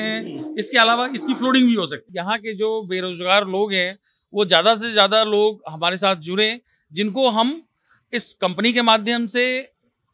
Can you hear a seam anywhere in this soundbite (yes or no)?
yes